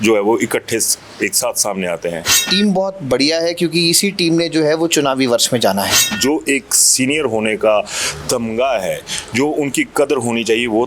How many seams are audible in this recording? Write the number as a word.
two